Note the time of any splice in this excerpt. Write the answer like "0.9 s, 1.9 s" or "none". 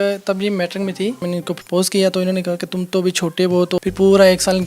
1.2 s, 3.8 s